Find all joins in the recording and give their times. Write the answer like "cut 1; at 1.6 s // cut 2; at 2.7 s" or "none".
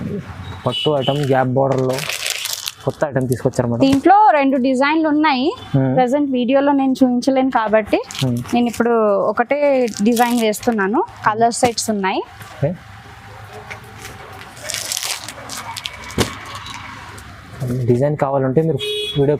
none